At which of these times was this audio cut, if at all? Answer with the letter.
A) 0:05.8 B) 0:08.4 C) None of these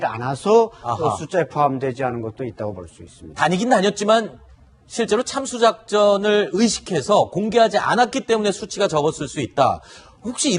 B